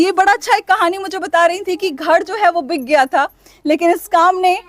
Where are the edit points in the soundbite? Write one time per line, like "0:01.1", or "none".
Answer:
none